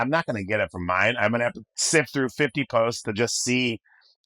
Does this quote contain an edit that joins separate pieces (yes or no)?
yes